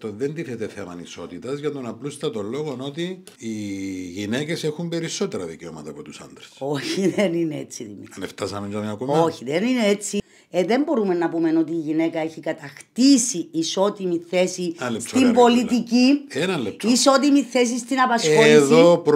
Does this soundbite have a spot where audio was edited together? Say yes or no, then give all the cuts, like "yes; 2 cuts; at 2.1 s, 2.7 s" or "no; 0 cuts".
yes; 2 cuts; at 3.3 s, 10.1 s